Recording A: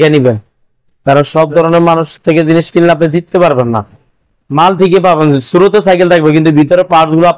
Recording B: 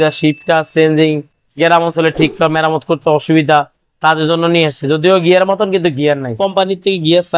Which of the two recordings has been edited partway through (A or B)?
B